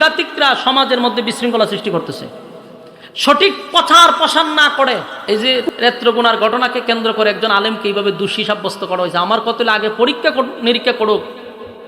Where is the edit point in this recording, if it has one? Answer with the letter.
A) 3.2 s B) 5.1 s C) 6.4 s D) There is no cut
B